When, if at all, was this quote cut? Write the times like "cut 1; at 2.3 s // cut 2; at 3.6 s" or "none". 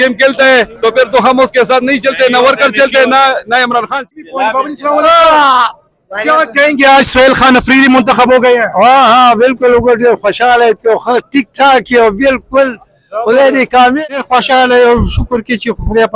cut 1; at 4.1 s // cut 2; at 14.0 s